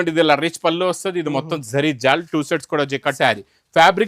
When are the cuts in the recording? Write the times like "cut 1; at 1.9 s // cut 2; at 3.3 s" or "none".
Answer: cut 1; at 3.1 s